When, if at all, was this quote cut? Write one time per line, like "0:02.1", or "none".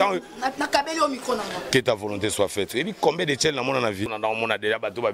0:04.1

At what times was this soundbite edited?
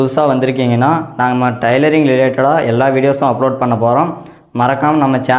none

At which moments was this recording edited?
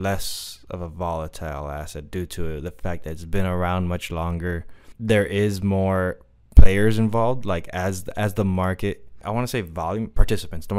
0:04.8
0:09.2

